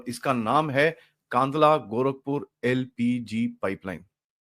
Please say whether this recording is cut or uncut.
uncut